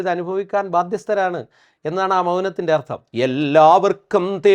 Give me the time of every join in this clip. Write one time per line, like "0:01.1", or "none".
0:03.0